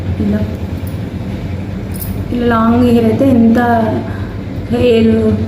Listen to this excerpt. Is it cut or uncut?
uncut